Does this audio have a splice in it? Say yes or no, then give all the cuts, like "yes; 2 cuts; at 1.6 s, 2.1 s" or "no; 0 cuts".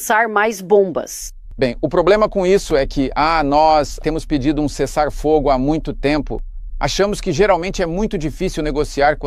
no; 0 cuts